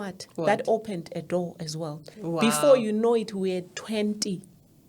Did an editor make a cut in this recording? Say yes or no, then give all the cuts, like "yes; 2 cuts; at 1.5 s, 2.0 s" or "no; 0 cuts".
yes; 1 cut; at 2.1 s